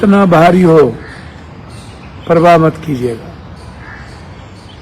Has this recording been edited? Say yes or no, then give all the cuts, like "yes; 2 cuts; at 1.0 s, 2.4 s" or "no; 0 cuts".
no; 0 cuts